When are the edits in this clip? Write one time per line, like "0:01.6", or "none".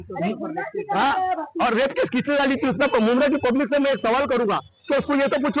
0:02.8